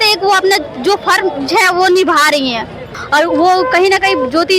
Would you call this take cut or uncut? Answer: cut